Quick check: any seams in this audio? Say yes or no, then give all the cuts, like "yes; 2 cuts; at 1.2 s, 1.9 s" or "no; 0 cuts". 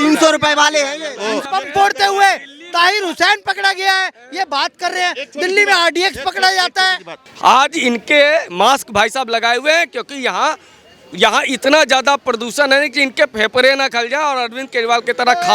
yes; 2 cuts; at 1.4 s, 7.1 s